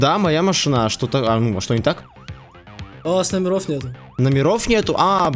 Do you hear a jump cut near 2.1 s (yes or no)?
no